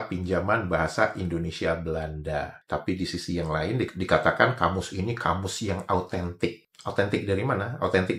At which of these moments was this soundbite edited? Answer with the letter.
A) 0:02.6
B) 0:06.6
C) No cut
C